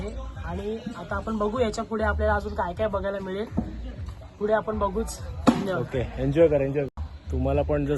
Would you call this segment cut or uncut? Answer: uncut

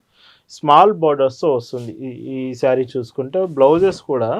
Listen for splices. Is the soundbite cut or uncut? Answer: uncut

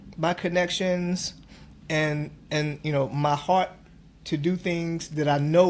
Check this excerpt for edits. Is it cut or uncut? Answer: uncut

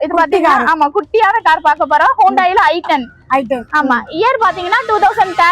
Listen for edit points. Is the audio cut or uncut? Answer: uncut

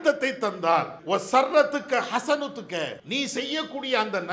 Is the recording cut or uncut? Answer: cut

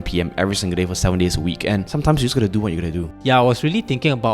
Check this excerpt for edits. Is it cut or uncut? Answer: cut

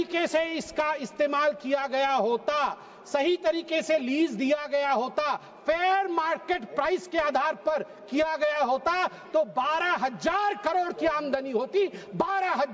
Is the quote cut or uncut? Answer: uncut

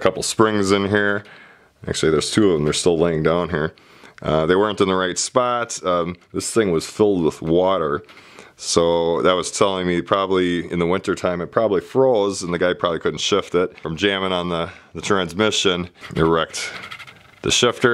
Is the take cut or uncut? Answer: cut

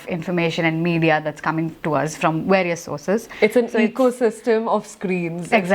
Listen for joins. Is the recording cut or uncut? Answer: cut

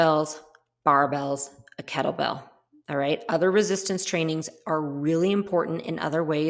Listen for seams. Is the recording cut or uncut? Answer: uncut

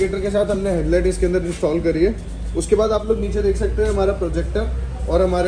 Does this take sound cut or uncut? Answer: uncut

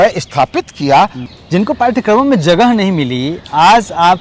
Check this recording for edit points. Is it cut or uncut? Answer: cut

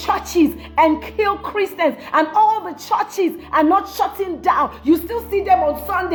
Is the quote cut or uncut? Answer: uncut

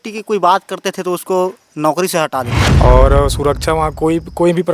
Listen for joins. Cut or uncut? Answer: cut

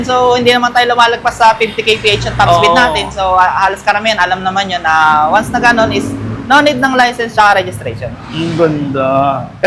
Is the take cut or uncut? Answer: uncut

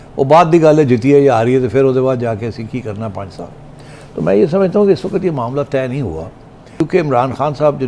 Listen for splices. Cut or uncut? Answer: cut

